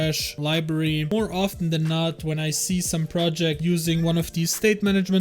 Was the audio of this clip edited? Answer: yes; 1 cut; at 1.1 s

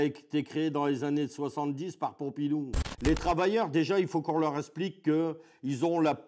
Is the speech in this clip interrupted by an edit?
yes; 1 cut; at 2.8 s

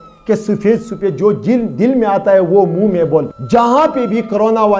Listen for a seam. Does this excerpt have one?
yes; 1 cut; at 3.4 s

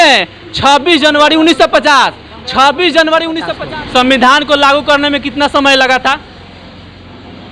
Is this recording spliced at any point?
yes; 1 cut; at 3.5 s

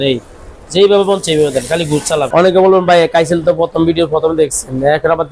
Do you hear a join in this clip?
yes; 1 cut; at 2.3 s

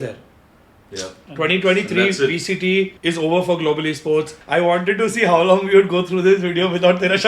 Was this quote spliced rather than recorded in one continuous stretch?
yes; 2 cuts; at 3.0 s, 4.4 s

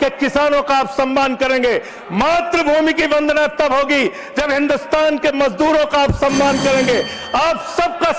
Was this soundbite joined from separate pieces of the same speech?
no; 0 cuts

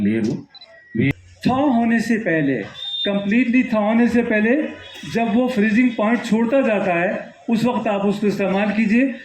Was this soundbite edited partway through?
yes; 1 cut; at 1.1 s

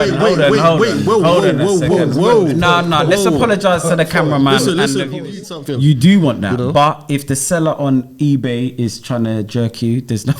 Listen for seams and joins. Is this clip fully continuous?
no; 1 cut; at 5.4 s

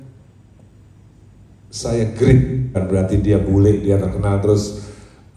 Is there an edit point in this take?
yes; 1 cut; at 2.8 s

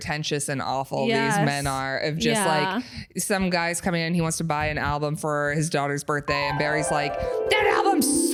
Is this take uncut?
yes; 0 cuts

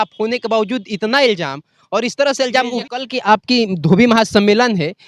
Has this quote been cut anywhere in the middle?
yes; 1 cut; at 2.8 s

